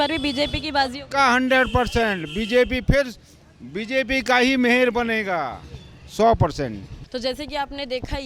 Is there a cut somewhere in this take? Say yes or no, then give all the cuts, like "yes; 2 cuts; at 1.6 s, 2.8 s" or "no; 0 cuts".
no; 0 cuts